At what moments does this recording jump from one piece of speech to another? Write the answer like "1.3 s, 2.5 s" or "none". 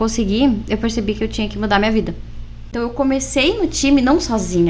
2.7 s